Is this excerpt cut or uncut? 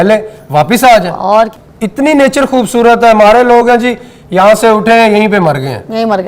cut